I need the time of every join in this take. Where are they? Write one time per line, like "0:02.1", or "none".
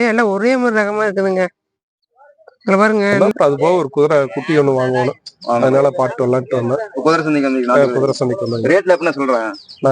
0:03.2